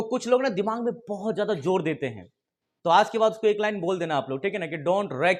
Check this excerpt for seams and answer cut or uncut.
uncut